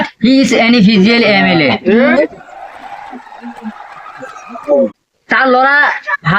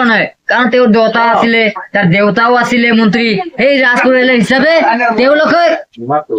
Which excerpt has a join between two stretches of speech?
first; 1 cut; at 5.1 s

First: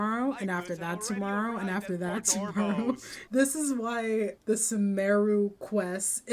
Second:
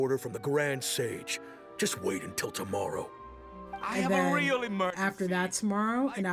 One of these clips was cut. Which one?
first; 2 cuts; at 3.1 s, 4.4 s

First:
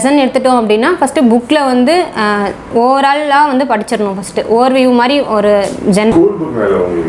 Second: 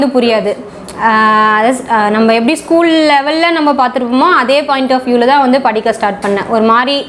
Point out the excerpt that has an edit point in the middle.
first; 1 cut; at 6.1 s

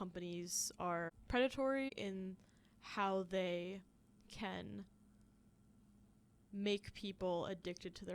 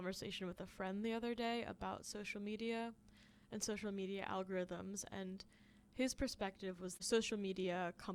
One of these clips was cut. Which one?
first; 1 cut; at 1.1 s

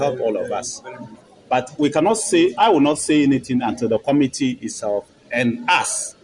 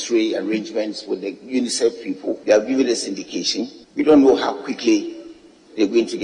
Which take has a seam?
second; 2 cuts; at 2.4 s, 3.8 s

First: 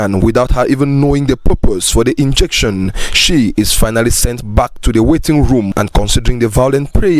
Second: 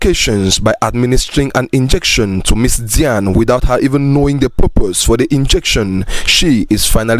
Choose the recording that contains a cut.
first; 1 cut; at 5.7 s

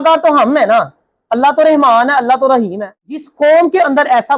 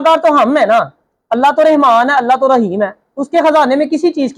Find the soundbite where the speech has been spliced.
first; 1 cut; at 3.2 s

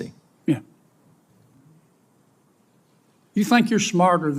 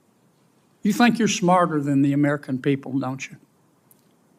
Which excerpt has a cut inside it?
first; 1 cut; at 1.6 s

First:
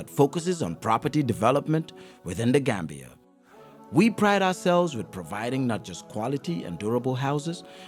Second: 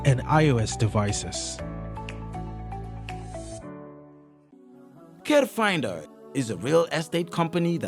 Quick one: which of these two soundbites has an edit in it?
second; 1 cut; at 4.5 s

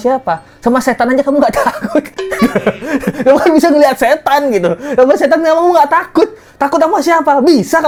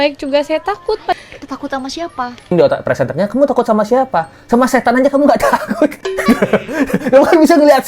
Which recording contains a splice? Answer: second; 1 cut; at 2.5 s

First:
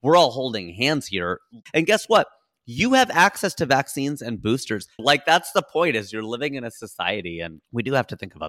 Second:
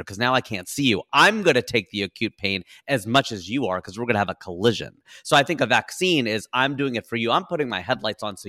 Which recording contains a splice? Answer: first; 3 cuts; at 1.6 s, 5.0 s, 7.6 s

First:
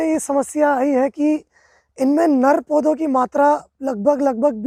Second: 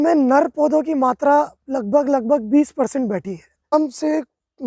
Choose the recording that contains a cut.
second; 1 cut; at 3.7 s

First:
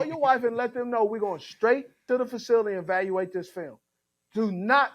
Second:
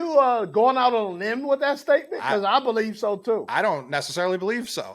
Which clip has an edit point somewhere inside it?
first; 1 cut; at 2.0 s

